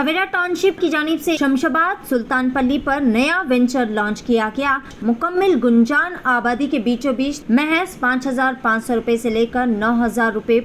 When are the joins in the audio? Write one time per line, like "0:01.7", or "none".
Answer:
0:00.8
0:04.9
0:07.4

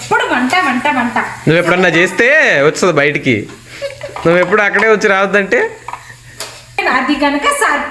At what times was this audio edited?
0:06.8

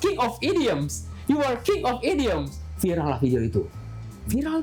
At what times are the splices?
none

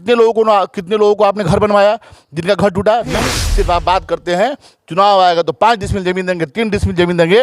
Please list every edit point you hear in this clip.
0:03.2

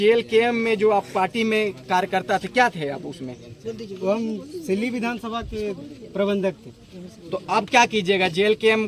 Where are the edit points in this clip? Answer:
none

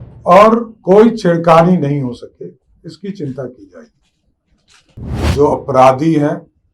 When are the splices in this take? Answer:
0:05.3

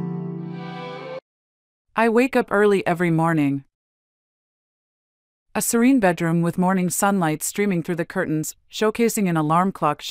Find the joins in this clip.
0:01.2

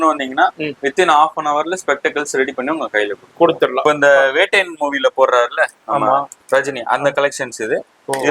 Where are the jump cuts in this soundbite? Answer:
0:03.8
0:06.3

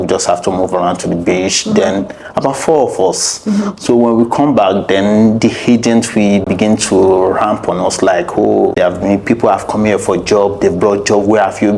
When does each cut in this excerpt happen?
0:08.7

